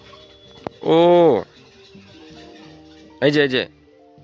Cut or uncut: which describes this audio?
uncut